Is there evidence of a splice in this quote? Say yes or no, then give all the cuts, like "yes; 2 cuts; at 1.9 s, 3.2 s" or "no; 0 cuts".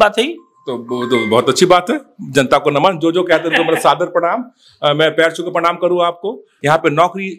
yes; 1 cut; at 6.5 s